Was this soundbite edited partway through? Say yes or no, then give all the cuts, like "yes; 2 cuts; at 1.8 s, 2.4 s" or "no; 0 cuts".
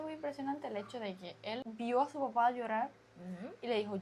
yes; 1 cut; at 1.6 s